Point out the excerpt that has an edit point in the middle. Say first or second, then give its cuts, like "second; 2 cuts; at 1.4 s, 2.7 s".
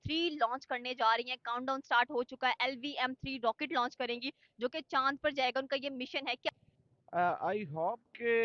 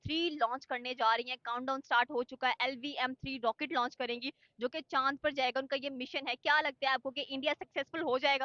first; 1 cut; at 6.5 s